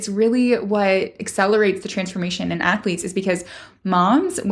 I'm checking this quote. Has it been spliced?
no; 0 cuts

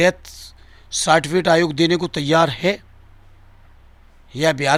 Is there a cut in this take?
no; 0 cuts

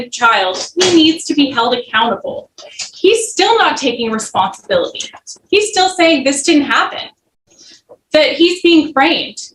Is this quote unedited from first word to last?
yes; 0 cuts

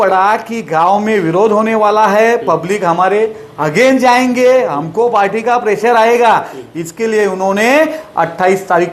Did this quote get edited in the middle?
no; 0 cuts

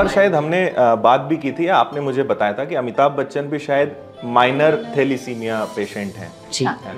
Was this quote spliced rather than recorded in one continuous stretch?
no; 0 cuts

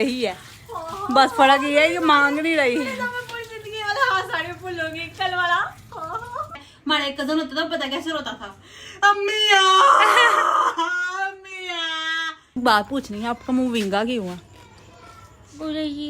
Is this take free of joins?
no; 2 cuts; at 6.6 s, 12.6 s

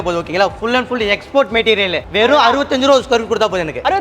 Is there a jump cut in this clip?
yes; 1 cut; at 2.0 s

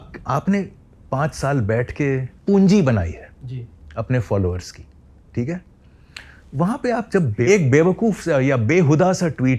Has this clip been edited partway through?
yes; 2 cuts; at 2.3 s, 7.4 s

